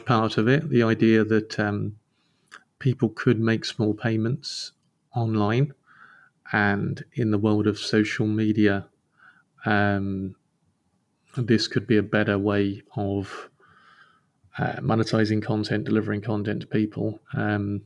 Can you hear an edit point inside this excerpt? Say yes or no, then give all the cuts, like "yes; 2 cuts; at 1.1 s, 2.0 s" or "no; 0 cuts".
no; 0 cuts